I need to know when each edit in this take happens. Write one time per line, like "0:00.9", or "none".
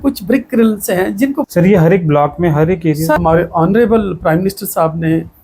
0:01.4
0:03.2